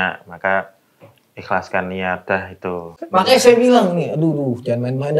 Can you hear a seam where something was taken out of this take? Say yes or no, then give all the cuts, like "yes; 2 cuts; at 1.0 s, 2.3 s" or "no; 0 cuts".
yes; 1 cut; at 3.0 s